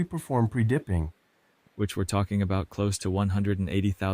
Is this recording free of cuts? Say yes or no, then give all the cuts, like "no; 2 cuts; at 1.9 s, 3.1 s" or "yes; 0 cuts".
no; 1 cut; at 1.2 s